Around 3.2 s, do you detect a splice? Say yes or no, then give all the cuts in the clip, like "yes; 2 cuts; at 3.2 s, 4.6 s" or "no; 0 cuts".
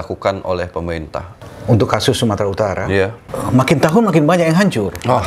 yes; 2 cuts; at 1.4 s, 3.2 s